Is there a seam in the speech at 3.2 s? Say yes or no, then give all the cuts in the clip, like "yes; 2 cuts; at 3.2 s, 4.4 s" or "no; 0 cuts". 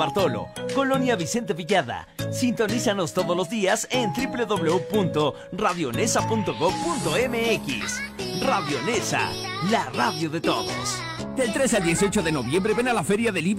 no; 1 cut; at 11.3 s